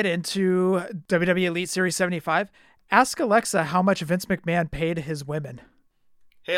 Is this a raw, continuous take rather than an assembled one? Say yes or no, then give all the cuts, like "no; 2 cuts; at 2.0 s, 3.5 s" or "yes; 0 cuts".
no; 1 cut; at 1.0 s